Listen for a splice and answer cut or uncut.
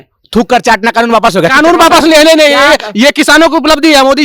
uncut